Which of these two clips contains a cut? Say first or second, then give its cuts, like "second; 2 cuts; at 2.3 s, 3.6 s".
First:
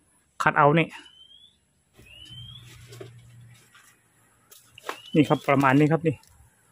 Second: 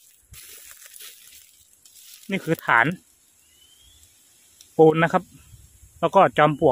first; 1 cut; at 2.0 s